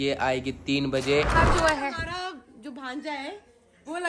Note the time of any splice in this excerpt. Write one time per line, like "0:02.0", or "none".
0:01.4